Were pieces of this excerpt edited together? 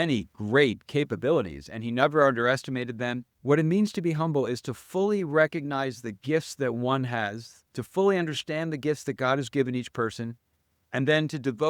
yes; 1 cut; at 3.3 s

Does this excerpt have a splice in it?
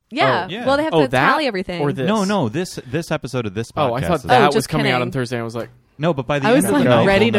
no; 0 cuts

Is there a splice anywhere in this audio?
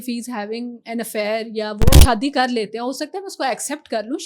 yes; 1 cut; at 1.9 s

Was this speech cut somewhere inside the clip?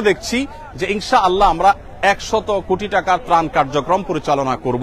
no; 0 cuts

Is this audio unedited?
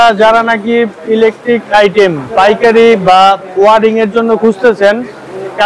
yes; 0 cuts

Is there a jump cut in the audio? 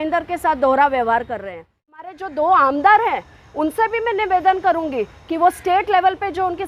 yes; 1 cut; at 2.1 s

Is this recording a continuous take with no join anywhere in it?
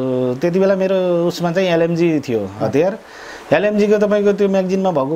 yes; 0 cuts

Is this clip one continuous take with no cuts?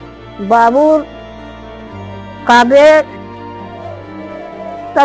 no; 2 cuts; at 1.2 s, 2.5 s

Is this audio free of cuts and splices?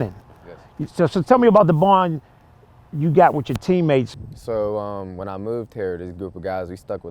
no; 1 cut; at 4.2 s

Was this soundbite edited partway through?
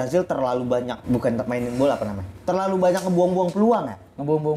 yes; 1 cut; at 1.0 s

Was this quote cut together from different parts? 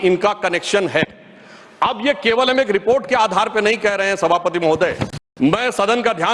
no; 0 cuts

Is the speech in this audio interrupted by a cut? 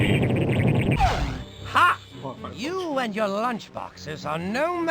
yes; 1 cut; at 0.9 s

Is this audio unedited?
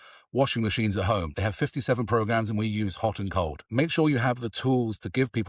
no; 2 cuts; at 1.3 s, 3.7 s

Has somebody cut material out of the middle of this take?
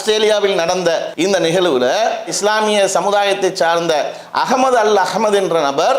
yes; 1 cut; at 1.1 s

